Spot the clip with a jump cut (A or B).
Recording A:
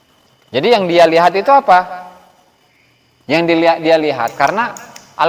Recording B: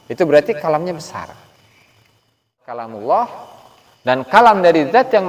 B